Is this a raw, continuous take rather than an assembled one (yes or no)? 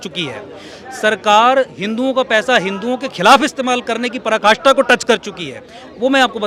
yes